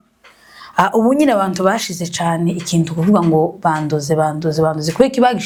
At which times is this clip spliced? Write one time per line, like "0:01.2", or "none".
none